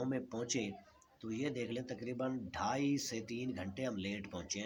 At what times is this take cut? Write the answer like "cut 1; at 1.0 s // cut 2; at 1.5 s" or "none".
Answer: none